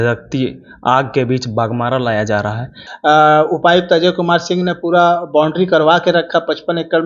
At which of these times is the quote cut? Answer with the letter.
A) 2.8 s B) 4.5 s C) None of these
A